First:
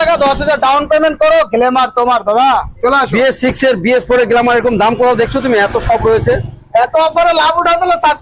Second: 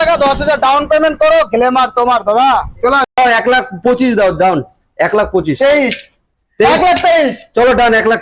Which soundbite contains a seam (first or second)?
second